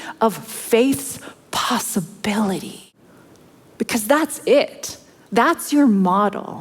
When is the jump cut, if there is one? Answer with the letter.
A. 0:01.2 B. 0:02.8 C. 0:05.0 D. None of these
B